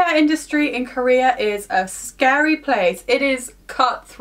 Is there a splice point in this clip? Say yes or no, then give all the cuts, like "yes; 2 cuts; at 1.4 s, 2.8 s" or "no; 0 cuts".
no; 0 cuts